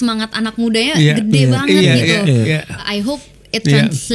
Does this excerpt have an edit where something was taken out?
yes; 1 cut; at 2.8 s

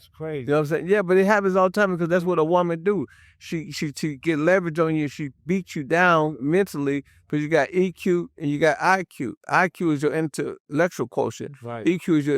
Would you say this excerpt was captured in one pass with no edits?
yes; 0 cuts

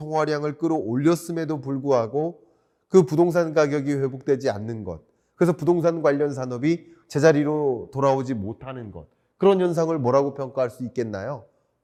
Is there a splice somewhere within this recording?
no; 0 cuts

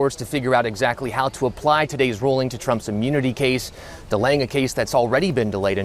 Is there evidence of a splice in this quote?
no; 0 cuts

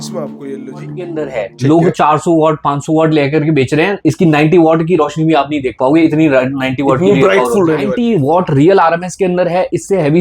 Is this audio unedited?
no; 2 cuts; at 1.2 s, 7.9 s

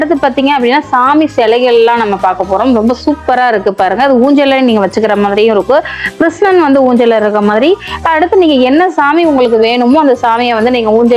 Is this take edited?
no; 0 cuts

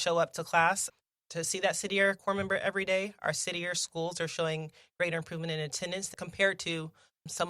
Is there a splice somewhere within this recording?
yes; 1 cut; at 6.1 s

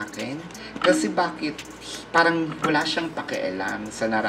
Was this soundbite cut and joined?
no; 0 cuts

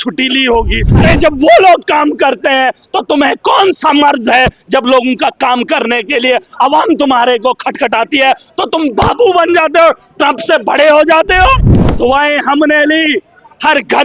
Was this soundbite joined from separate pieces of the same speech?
yes; 2 cuts; at 0.9 s, 11.8 s

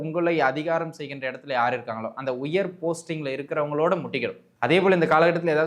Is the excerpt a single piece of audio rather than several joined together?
no; 1 cut; at 4.4 s

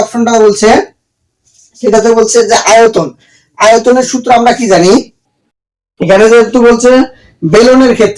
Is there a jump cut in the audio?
no; 0 cuts

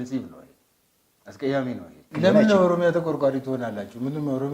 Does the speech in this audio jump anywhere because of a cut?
yes; 1 cut; at 2.1 s

